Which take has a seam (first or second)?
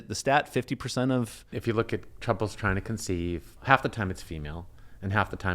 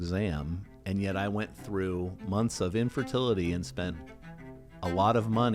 first